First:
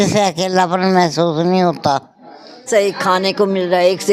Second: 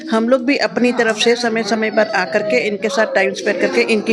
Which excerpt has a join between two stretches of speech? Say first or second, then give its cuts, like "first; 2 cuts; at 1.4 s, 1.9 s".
first; 1 cut; at 2.6 s